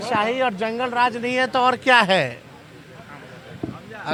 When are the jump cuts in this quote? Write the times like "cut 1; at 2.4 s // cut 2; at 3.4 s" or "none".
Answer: none